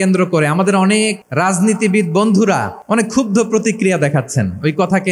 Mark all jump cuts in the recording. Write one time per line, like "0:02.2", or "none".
0:01.2
0:02.7